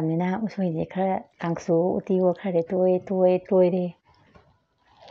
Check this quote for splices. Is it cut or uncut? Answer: uncut